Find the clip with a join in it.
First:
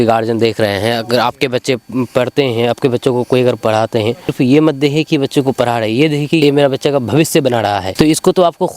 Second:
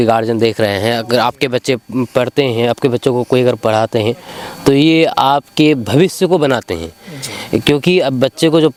first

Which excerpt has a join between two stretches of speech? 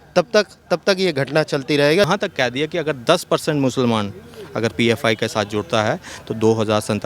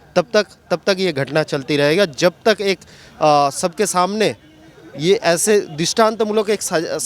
first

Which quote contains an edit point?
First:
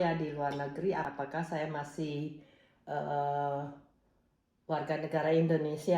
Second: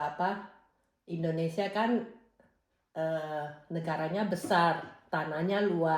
first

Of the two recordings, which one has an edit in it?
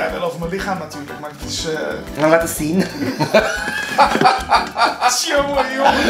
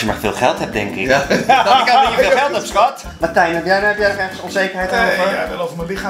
second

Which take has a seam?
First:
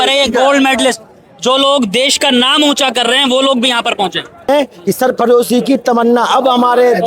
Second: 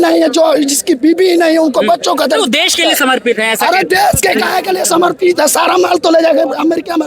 first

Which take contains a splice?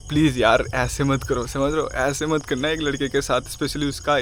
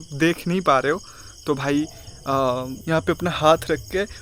second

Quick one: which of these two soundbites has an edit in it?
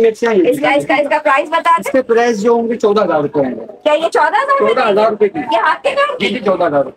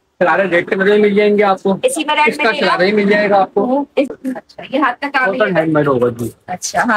second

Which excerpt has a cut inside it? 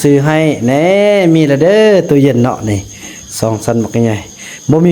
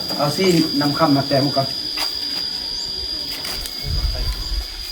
second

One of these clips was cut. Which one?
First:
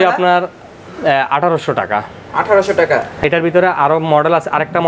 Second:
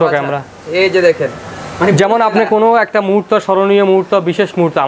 first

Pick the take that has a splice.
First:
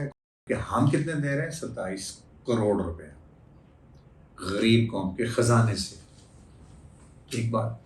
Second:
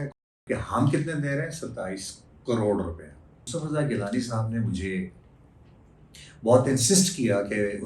second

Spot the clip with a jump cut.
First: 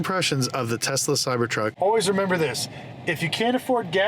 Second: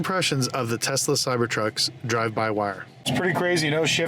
first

